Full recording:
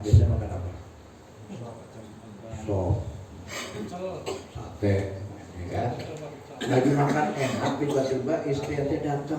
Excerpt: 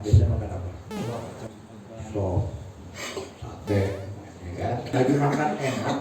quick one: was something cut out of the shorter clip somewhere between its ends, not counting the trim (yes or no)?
yes